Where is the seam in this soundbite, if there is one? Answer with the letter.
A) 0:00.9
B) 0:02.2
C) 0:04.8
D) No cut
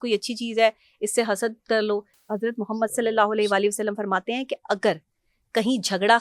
B